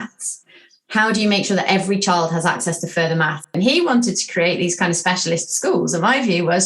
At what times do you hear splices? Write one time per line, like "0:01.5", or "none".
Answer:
0:03.5